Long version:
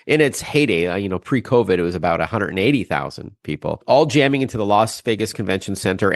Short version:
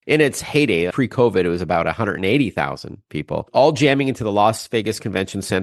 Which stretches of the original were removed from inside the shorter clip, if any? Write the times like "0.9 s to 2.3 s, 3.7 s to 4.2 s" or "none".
0.9 s to 1.2 s